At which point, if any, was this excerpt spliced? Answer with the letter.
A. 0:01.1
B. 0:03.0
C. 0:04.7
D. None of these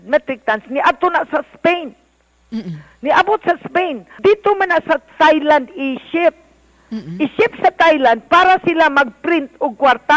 D